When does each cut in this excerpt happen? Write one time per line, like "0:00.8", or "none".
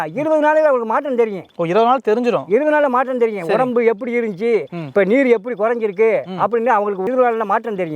none